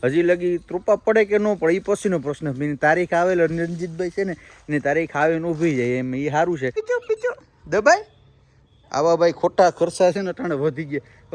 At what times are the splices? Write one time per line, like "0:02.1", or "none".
0:06.8